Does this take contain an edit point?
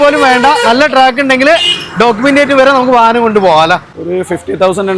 yes; 1 cut; at 3.9 s

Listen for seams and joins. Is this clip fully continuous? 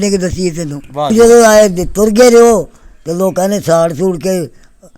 no; 1 cut; at 1.1 s

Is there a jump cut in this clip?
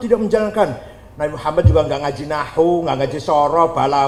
no; 0 cuts

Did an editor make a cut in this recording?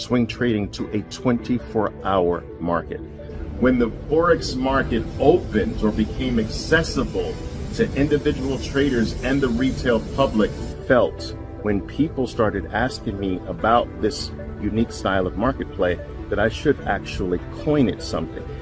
yes; 2 cuts; at 3.3 s, 10.8 s

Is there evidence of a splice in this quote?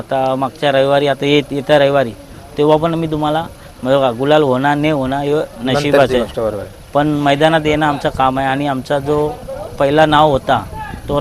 no; 0 cuts

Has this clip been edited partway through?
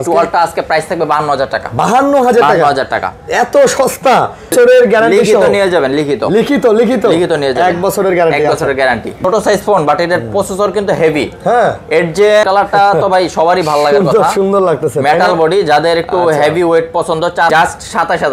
yes; 4 cuts; at 4.5 s, 9.2 s, 12.4 s, 17.5 s

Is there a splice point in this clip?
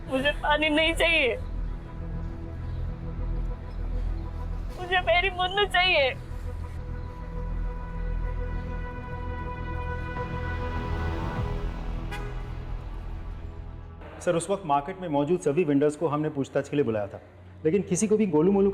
no; 0 cuts

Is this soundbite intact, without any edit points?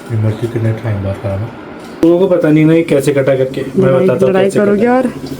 no; 1 cut; at 2.0 s

